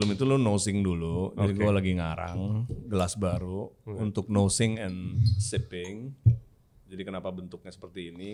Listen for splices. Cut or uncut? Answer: uncut